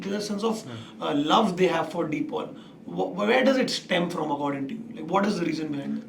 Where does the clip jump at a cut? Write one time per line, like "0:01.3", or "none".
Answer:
none